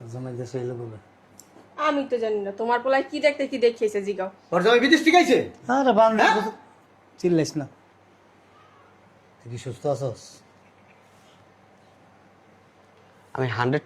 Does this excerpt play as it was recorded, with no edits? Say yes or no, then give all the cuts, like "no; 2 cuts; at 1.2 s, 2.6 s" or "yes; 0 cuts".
yes; 0 cuts